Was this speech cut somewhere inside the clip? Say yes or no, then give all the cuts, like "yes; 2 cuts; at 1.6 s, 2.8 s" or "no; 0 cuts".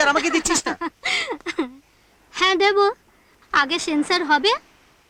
no; 0 cuts